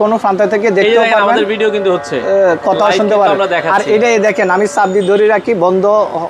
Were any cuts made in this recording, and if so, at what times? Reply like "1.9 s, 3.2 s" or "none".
none